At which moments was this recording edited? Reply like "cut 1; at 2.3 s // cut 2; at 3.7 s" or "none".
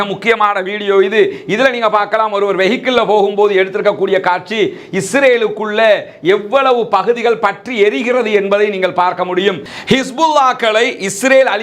cut 1; at 9.7 s